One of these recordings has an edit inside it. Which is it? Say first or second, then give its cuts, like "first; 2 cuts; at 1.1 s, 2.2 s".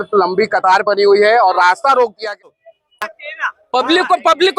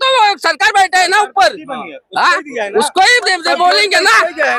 first; 1 cut; at 2.4 s